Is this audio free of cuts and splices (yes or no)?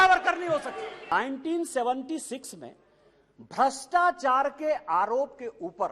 no